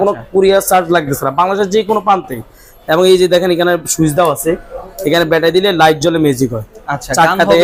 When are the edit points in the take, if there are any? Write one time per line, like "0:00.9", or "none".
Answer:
none